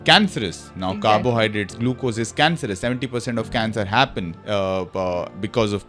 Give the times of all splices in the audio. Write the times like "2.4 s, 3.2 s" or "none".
none